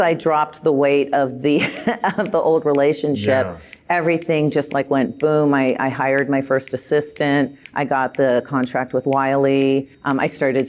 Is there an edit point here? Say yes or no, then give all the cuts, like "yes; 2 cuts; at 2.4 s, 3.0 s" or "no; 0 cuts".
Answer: no; 0 cuts